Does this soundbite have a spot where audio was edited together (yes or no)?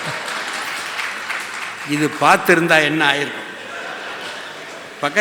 no